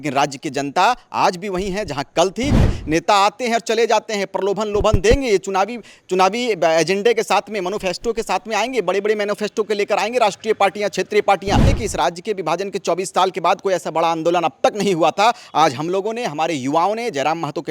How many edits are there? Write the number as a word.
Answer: two